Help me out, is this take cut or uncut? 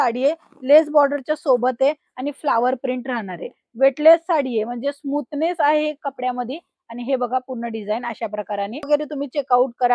cut